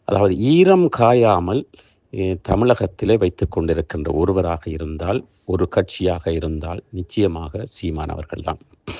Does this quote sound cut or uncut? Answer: uncut